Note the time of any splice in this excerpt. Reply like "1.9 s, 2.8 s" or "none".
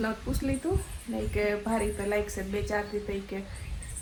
none